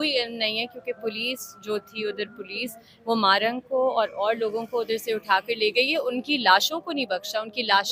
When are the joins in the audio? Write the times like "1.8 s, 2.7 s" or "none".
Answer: none